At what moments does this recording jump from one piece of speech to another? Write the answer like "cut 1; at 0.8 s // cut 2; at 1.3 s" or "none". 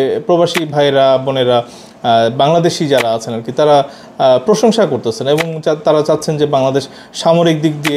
none